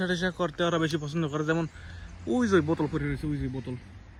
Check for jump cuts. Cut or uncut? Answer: uncut